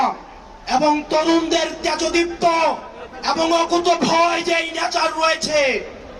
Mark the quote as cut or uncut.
uncut